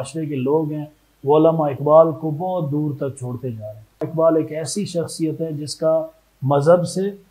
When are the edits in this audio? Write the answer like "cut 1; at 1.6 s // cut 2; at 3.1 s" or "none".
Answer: cut 1; at 4.1 s